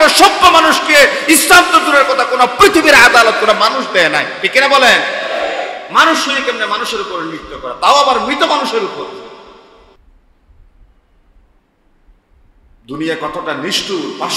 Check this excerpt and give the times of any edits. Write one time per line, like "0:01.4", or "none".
none